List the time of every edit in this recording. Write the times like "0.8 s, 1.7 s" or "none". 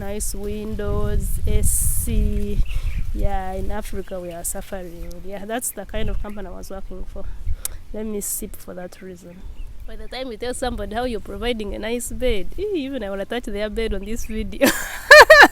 10.0 s